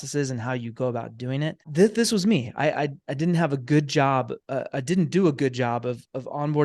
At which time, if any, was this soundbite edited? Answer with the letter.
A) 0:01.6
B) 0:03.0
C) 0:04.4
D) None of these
A